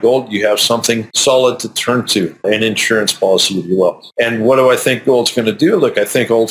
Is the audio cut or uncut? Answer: cut